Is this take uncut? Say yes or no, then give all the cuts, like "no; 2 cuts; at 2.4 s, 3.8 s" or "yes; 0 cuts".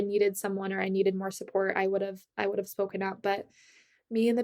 yes; 0 cuts